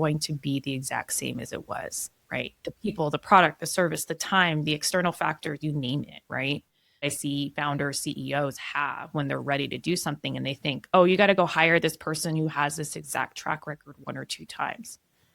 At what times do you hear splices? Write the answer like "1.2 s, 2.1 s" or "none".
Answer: 7.1 s, 10.8 s